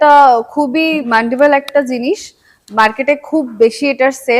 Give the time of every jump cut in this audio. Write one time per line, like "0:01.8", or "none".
0:01.0

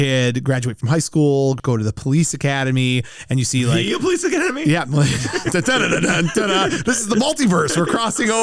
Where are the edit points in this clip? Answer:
0:01.6

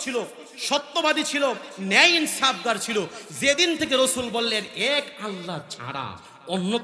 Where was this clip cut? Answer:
none

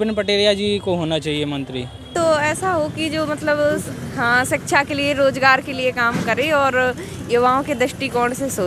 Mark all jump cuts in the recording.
0:02.0

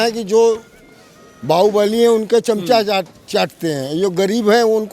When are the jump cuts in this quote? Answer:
none

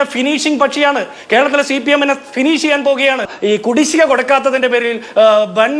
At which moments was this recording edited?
0:03.3

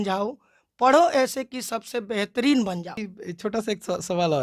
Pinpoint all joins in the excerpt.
0:03.1

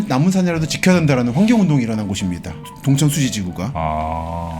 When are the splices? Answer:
0:02.7

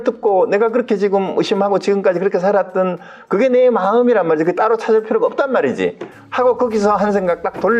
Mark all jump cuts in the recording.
none

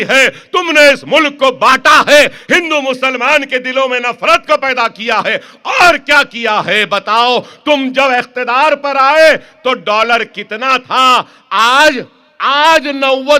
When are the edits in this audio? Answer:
none

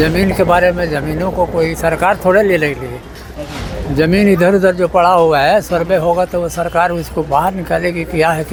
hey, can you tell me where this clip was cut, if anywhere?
none

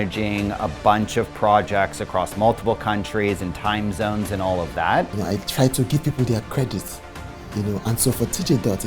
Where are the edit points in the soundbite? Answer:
0:05.1

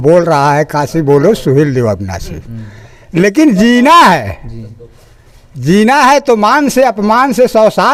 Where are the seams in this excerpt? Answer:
none

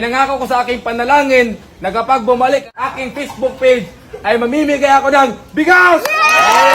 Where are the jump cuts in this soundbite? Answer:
0:02.7

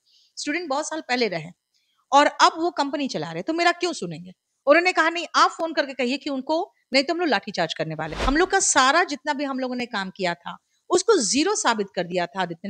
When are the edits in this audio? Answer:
0:08.2

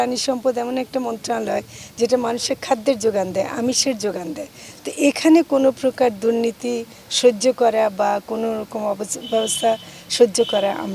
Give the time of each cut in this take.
none

